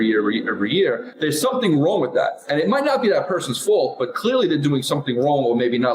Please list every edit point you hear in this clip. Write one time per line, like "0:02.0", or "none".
0:01.1